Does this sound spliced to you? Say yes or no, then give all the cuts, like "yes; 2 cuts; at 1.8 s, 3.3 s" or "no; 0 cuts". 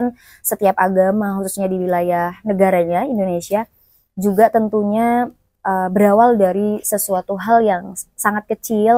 no; 0 cuts